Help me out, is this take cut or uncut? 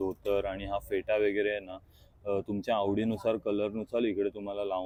uncut